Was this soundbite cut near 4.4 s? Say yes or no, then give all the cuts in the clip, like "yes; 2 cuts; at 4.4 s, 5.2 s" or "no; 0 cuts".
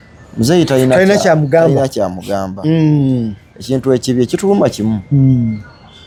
no; 0 cuts